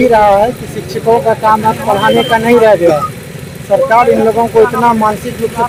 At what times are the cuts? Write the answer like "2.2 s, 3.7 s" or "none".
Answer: none